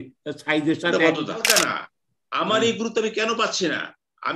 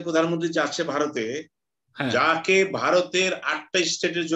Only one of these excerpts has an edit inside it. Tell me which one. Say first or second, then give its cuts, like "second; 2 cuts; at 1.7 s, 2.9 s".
first; 1 cut; at 1.4 s